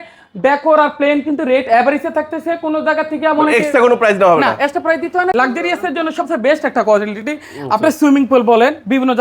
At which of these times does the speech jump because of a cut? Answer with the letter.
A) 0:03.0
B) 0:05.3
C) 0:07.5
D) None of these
B